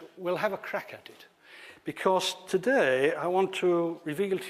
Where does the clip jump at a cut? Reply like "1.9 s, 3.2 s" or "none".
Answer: 1.7 s